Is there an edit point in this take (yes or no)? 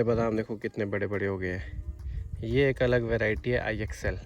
no